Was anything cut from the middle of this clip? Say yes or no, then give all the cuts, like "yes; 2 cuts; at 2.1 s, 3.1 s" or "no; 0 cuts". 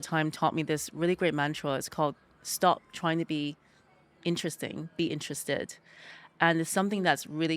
no; 0 cuts